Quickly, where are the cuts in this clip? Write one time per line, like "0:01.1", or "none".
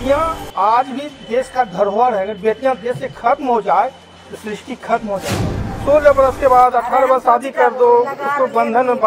0:05.7

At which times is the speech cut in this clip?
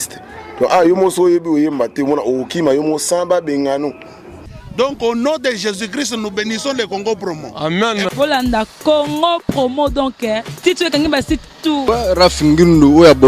0:04.6
0:11.8

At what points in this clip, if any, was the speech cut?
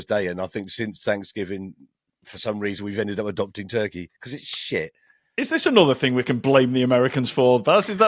none

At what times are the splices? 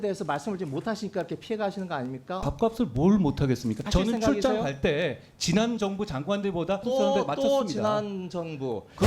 0:02.4
0:03.9
0:06.8

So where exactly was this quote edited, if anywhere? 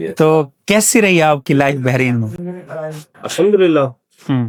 none

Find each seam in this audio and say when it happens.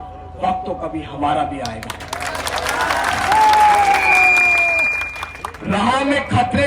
none

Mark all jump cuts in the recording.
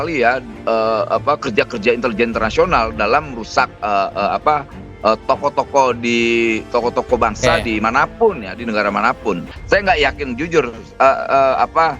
0:09.5

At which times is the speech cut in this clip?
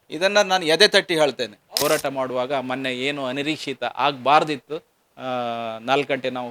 0:01.6

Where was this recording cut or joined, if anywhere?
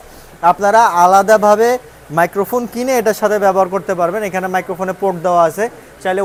none

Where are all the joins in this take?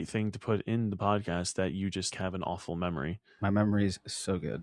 0:03.2

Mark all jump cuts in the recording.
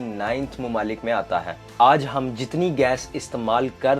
0:01.7

